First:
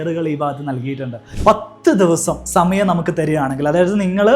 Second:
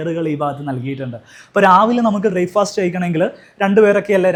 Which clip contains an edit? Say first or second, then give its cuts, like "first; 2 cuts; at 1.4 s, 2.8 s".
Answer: first; 1 cut; at 1.3 s